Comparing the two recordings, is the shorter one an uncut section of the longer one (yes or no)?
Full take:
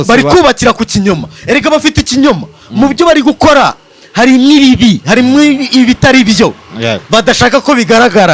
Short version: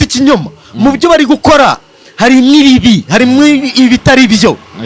yes